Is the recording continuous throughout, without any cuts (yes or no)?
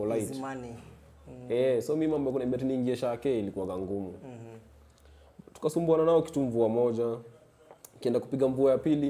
yes